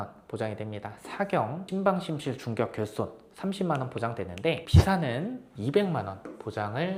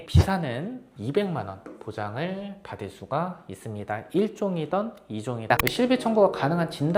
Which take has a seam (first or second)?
second